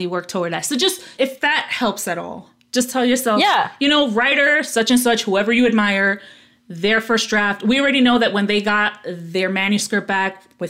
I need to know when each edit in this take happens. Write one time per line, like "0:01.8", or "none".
none